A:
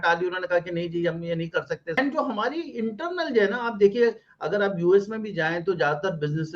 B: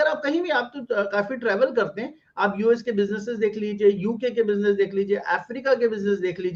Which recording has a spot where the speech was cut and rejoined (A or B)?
A